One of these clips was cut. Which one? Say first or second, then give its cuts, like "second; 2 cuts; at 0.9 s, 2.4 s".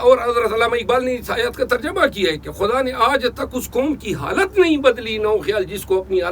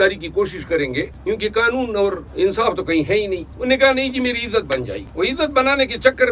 second; 4 cuts; at 1.1 s, 2.2 s, 3.5 s, 5.0 s